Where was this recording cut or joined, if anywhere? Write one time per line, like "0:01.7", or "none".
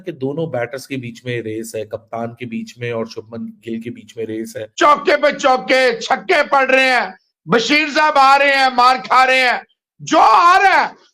0:04.6